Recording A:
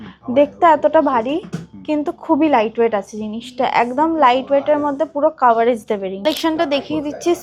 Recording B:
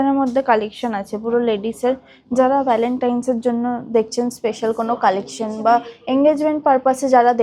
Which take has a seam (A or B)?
A